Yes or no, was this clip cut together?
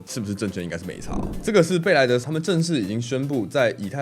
yes